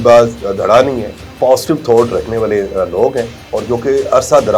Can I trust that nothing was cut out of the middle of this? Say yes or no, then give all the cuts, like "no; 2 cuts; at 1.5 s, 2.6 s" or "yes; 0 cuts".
no; 1 cut; at 1.2 s